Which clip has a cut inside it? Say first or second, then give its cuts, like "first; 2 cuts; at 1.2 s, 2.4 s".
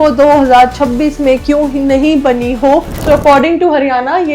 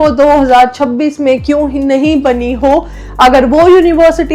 first; 1 cut; at 2.9 s